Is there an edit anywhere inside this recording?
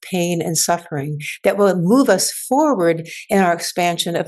no; 0 cuts

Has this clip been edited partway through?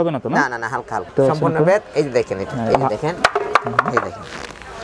yes; 1 cut; at 1.1 s

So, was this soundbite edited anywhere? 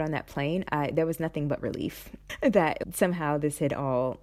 no; 0 cuts

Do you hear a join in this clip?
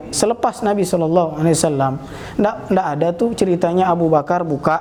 no; 0 cuts

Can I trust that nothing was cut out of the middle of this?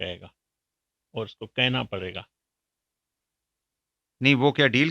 yes; 0 cuts

